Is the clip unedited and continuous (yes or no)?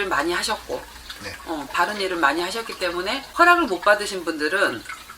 no